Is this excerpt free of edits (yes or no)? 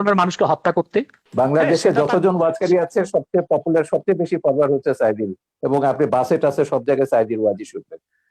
no